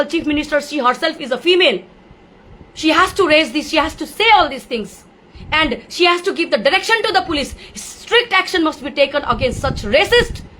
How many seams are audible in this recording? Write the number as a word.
zero